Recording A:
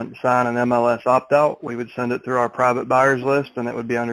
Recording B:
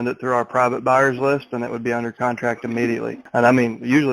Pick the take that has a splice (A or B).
B